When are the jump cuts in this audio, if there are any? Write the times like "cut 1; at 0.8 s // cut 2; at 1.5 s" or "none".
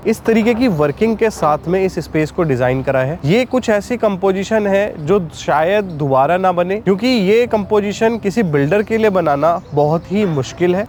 none